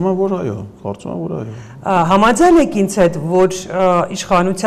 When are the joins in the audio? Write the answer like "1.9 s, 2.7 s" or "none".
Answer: none